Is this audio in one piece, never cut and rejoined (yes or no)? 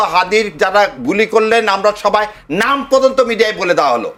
yes